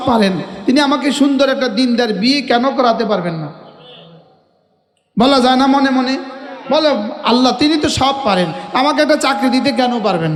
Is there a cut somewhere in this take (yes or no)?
no